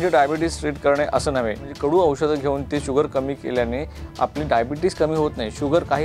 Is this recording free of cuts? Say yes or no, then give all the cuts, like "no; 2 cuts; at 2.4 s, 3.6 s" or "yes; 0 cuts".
no; 1 cut; at 1.7 s